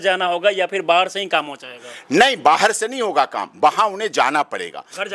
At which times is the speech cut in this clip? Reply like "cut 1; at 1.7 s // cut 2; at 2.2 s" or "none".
none